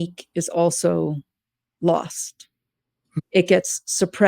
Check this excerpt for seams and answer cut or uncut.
cut